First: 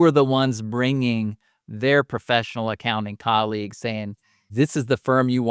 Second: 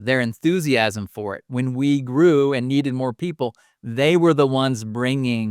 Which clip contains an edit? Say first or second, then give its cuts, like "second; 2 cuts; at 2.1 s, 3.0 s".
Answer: first; 1 cut; at 4.3 s